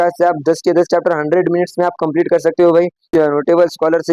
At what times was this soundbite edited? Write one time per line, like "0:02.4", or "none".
0:03.1